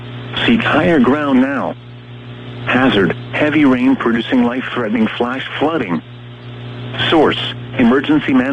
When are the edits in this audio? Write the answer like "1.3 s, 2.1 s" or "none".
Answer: 7.6 s